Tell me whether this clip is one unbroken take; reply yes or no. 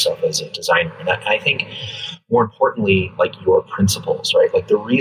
yes